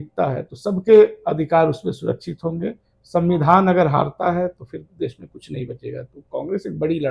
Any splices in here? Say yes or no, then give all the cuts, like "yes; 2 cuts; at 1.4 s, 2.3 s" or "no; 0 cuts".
no; 0 cuts